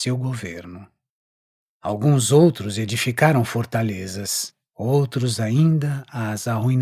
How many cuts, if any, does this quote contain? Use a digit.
1